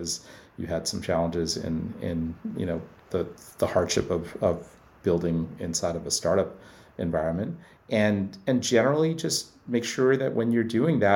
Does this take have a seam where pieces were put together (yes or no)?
no